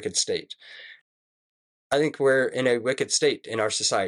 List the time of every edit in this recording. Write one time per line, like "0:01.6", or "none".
0:01.2